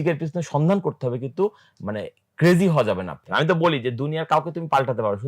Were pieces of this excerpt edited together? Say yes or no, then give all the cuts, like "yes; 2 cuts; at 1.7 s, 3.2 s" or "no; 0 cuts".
yes; 1 cut; at 3.2 s